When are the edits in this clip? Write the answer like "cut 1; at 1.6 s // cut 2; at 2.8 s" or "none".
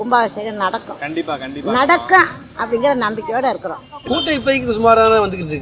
cut 1; at 3.9 s

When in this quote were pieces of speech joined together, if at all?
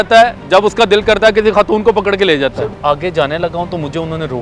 cut 1; at 2.6 s

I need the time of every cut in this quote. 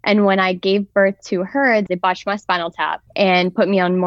cut 1; at 1.9 s // cut 2; at 3.0 s

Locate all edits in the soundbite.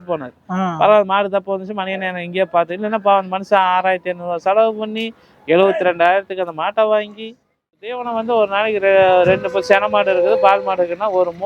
cut 1; at 7.7 s

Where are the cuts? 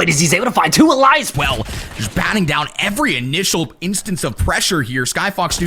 cut 1; at 1.3 s

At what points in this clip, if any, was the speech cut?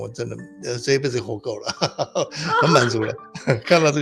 none

